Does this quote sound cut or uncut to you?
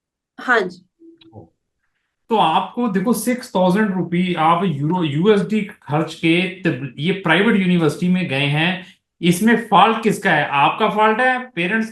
uncut